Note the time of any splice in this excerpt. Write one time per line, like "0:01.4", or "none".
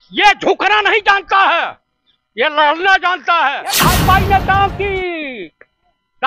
0:03.8

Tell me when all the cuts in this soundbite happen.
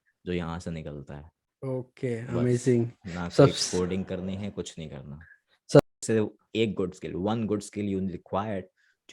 0:05.8

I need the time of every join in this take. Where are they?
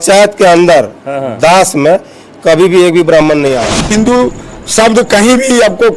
0:03.9

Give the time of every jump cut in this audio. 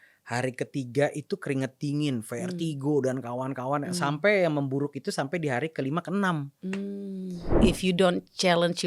0:07.6

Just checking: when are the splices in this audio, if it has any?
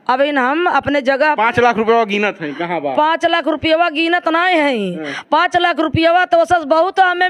none

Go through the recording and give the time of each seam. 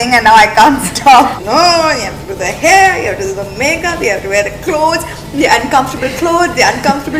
0:01.4

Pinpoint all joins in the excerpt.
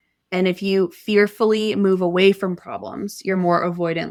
none

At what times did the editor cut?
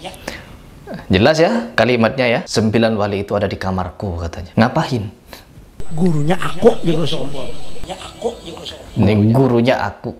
0:02.5
0:04.3

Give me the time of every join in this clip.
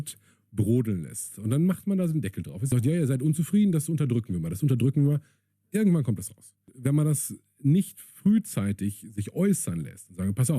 0:02.5
0:06.7

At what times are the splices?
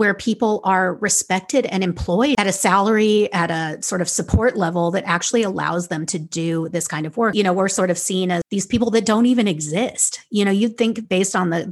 0:02.4
0:07.3
0:08.5

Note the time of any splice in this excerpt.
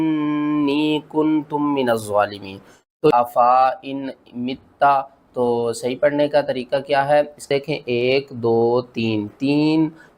0:03.1
0:07.5

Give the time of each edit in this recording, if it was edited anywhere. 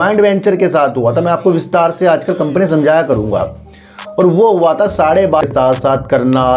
0:05.5

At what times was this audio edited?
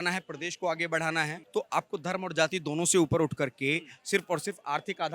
0:01.4

